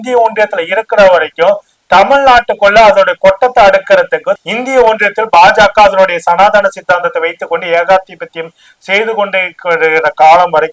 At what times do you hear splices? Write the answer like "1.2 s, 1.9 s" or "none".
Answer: none